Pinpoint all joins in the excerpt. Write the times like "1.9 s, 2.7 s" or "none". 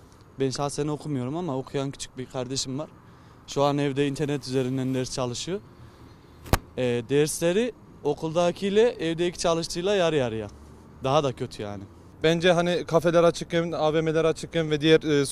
12.0 s